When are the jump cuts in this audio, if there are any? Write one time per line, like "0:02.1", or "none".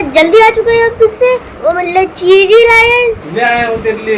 0:03.3